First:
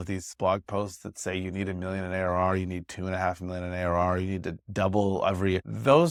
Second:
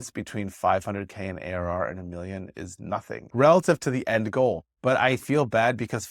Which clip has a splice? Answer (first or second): second